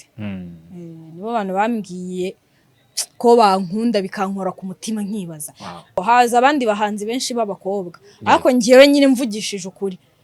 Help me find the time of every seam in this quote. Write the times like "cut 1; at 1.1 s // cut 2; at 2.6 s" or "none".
cut 1; at 6.0 s